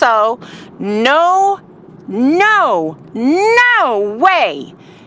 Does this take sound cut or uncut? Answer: uncut